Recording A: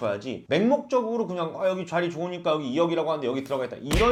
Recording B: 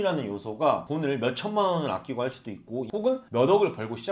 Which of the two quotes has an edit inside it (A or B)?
B